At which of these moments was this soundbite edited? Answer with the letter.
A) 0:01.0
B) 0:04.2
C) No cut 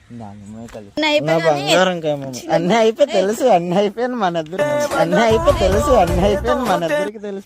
A